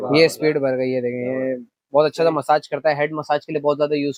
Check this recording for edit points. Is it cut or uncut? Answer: uncut